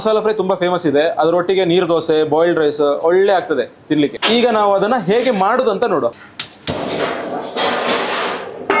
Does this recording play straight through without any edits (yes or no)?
yes